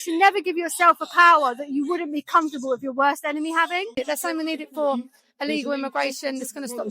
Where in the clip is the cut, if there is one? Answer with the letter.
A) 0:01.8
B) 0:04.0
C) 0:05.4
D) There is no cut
B